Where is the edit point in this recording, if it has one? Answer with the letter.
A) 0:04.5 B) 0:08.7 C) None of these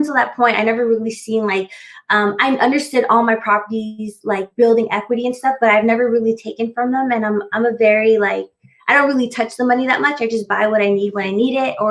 C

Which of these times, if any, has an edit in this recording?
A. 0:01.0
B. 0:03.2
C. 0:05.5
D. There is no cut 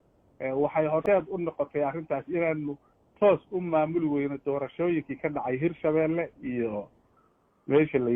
A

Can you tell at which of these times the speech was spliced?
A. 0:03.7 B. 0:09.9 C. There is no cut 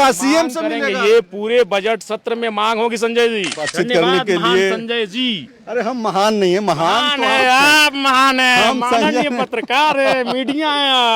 A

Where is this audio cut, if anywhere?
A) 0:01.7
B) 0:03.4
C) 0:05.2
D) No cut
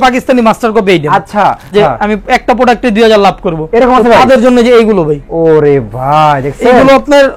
A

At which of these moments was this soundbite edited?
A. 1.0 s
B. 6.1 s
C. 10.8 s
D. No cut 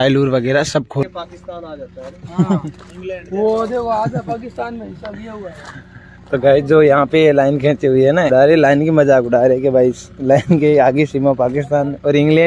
A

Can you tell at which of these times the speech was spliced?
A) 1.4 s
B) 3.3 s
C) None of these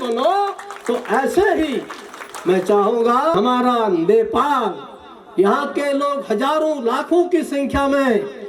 B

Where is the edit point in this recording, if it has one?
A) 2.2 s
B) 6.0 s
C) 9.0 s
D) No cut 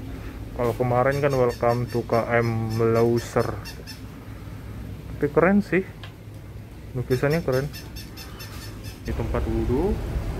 C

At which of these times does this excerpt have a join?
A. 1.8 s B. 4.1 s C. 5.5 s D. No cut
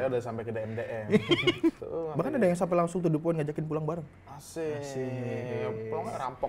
A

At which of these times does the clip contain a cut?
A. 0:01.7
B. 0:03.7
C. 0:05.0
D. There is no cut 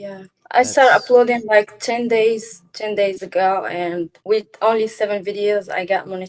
D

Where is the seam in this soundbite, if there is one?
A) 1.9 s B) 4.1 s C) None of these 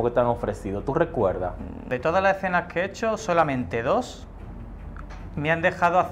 A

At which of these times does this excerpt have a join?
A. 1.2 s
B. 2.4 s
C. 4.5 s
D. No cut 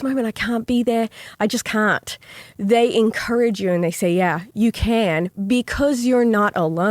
A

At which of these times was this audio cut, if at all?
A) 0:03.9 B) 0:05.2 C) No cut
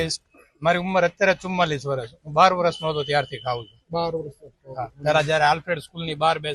C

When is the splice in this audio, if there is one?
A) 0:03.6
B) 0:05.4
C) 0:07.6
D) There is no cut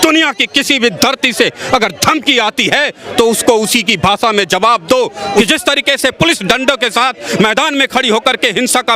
B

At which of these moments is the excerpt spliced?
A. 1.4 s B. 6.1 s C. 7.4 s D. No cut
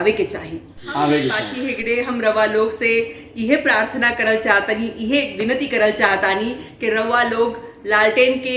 A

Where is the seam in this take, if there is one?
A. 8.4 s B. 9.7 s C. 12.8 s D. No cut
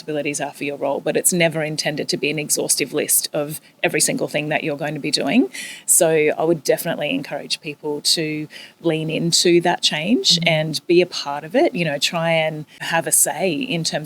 C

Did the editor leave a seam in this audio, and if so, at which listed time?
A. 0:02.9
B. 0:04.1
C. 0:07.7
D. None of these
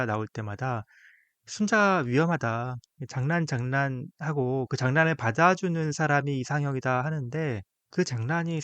C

